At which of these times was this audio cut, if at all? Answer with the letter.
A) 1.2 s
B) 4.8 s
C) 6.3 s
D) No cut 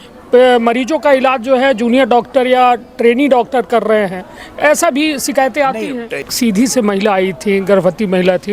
C